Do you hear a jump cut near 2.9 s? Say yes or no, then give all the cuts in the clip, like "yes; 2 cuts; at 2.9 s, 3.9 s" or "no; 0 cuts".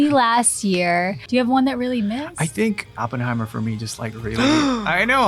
yes; 2 cuts; at 1.2 s, 2.9 s